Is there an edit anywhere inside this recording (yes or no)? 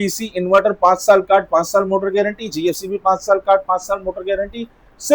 no